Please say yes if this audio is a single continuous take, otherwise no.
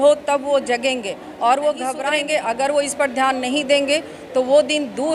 no